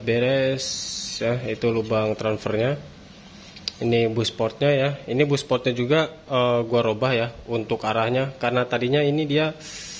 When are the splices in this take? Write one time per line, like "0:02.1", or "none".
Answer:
none